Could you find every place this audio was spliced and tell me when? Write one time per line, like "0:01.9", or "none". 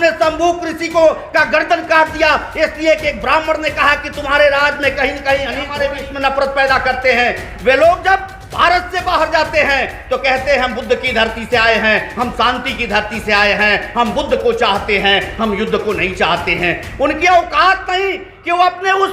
0:05.7